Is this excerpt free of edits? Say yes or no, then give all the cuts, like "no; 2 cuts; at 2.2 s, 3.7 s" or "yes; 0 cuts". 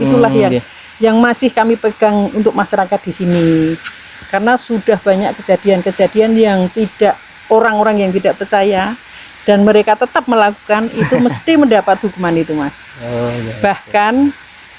yes; 0 cuts